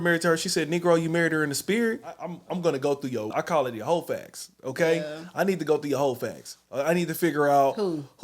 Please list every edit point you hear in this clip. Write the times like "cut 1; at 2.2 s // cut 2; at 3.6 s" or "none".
cut 1; at 2.3 s // cut 2; at 3.3 s